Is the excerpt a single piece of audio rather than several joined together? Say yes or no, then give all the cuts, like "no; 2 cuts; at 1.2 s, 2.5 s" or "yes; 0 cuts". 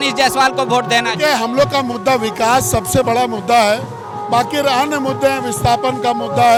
yes; 0 cuts